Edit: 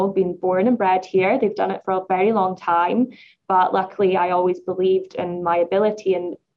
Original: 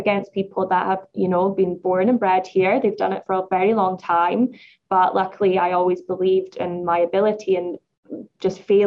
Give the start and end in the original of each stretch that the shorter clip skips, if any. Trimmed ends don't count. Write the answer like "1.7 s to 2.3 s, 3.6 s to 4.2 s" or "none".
none